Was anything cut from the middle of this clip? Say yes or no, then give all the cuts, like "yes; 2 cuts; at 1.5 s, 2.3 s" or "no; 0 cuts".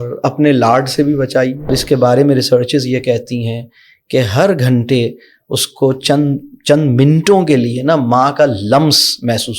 yes; 1 cut; at 1.7 s